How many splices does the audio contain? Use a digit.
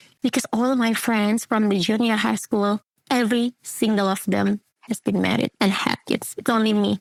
0